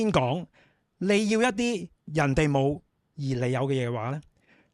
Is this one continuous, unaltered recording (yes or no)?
no